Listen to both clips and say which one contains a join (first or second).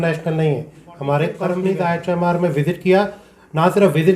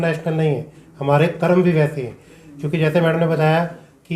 first